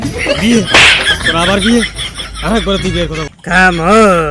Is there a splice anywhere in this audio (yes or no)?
yes